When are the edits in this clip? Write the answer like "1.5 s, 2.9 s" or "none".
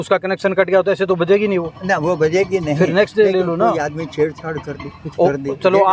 none